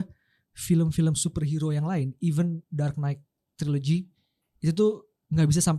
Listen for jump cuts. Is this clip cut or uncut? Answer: uncut